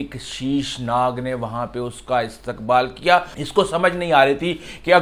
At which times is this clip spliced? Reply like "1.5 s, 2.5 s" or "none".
3.4 s

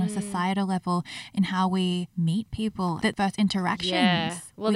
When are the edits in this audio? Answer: 3.0 s

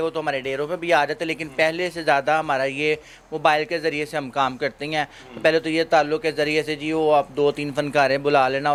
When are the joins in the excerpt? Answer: none

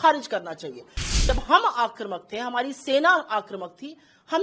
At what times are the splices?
1.1 s

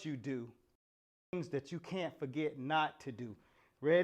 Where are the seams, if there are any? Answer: 1.3 s

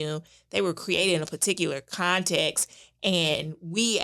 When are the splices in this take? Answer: none

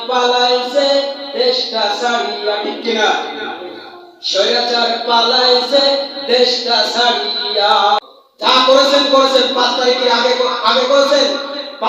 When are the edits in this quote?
8.0 s

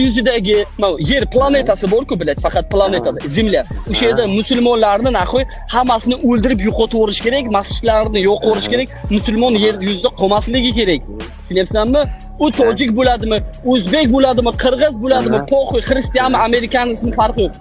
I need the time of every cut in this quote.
none

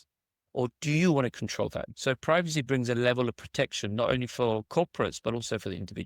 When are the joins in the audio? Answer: 1.9 s

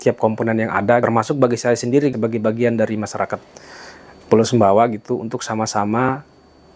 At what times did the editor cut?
1.0 s, 2.1 s

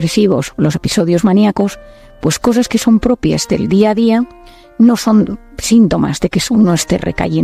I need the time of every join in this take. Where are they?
none

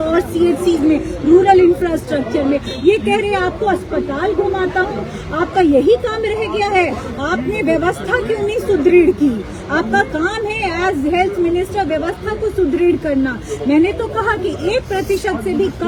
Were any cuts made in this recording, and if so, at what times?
none

